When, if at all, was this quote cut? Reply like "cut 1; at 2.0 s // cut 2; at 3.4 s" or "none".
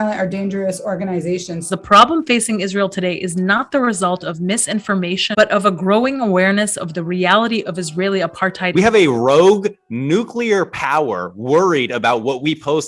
cut 1; at 1.6 s // cut 2; at 5.3 s // cut 3; at 8.7 s